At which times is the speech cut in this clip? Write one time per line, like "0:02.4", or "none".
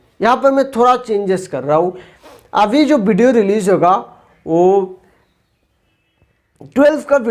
none